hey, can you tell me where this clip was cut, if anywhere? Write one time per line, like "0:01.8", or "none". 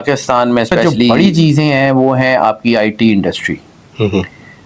0:01.1